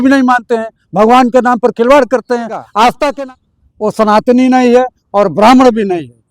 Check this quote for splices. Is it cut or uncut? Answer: cut